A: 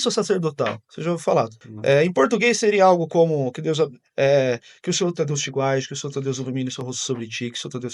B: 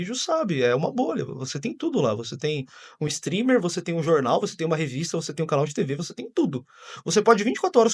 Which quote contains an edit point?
A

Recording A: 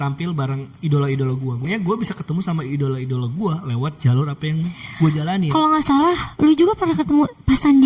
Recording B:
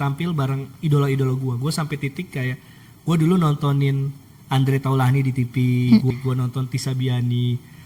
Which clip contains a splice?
A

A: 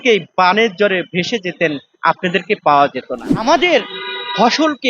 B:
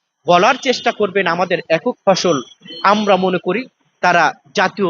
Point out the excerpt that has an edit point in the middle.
A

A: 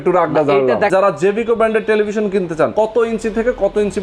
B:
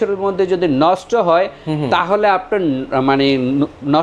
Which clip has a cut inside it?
A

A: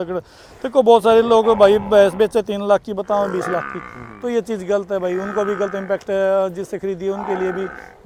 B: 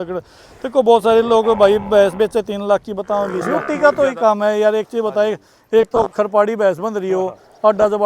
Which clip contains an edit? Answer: B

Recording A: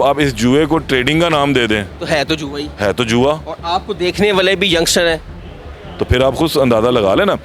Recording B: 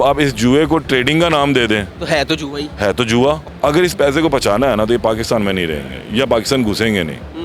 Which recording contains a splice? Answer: B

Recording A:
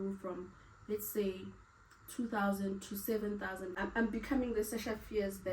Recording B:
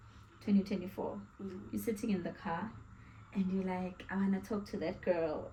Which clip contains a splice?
A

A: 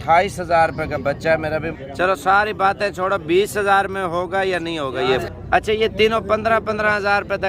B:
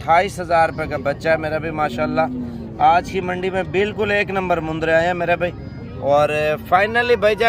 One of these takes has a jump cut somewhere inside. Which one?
A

